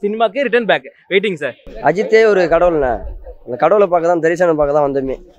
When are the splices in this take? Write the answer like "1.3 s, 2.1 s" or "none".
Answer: 1.6 s